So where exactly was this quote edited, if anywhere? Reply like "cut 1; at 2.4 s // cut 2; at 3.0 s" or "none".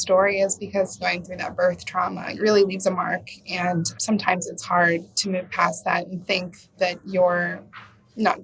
cut 1; at 1.0 s // cut 2; at 2.3 s // cut 3; at 3.9 s // cut 4; at 6.8 s